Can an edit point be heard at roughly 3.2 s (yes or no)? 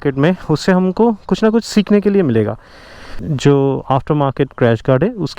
yes